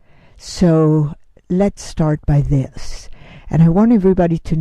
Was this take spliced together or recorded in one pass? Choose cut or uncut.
cut